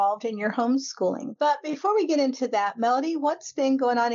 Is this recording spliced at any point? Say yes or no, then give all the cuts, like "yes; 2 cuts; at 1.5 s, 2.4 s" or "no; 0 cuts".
yes; 1 cut; at 1.6 s